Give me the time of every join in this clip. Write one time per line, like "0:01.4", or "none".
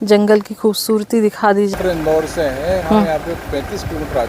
0:01.7